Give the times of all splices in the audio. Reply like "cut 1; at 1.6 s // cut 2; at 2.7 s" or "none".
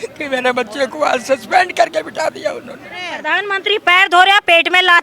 cut 1; at 3.2 s